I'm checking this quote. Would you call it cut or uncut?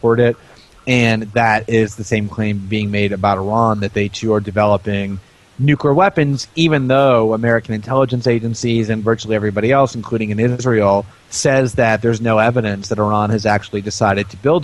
uncut